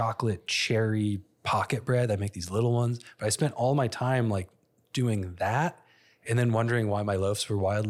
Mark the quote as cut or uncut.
uncut